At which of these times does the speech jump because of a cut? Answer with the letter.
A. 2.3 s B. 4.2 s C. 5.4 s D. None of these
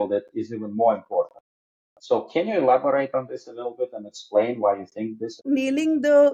C